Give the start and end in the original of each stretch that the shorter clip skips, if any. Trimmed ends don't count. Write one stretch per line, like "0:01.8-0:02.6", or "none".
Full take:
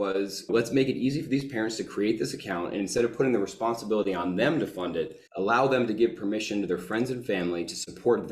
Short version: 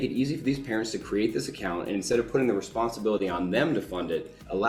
none